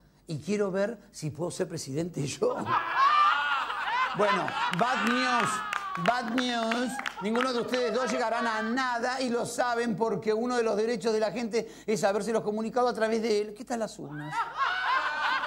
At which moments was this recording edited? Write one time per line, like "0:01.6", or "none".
0:01.0